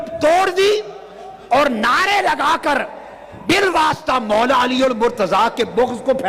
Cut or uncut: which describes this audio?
uncut